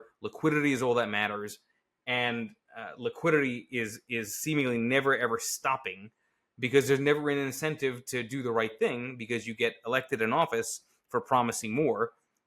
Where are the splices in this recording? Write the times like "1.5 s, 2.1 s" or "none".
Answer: none